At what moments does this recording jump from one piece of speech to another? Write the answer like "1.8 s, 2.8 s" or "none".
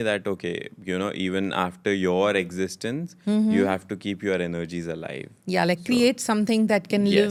none

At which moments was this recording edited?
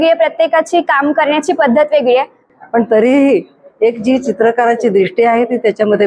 2.5 s

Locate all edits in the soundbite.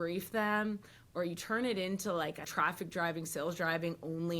2.5 s

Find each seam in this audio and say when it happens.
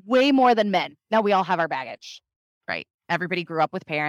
none

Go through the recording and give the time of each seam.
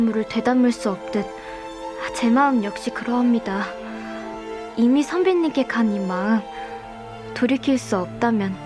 none

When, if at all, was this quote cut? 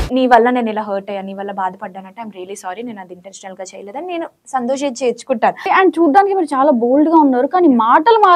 5.7 s

